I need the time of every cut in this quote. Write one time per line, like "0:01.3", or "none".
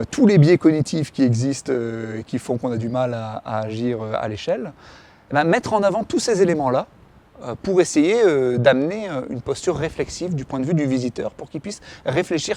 none